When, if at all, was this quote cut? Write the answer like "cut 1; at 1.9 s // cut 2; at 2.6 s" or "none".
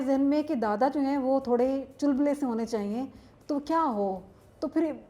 none